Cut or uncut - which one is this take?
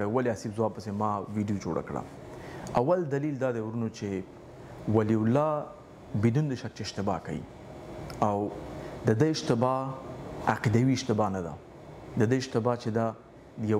uncut